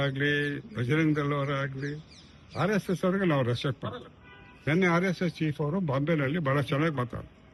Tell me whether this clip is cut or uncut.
uncut